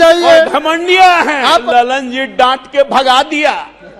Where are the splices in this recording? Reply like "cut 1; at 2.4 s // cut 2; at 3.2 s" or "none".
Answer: cut 1; at 1.6 s